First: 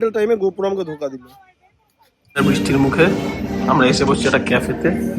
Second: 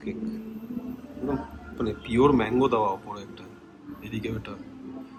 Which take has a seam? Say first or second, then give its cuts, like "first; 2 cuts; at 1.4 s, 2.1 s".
first; 1 cut; at 2.4 s